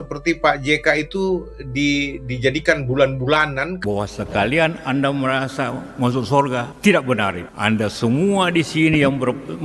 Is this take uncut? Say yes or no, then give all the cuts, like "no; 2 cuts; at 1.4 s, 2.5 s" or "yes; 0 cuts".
no; 1 cut; at 3.7 s